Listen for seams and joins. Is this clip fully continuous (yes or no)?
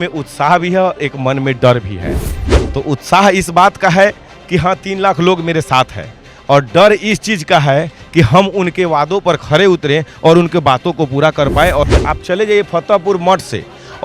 no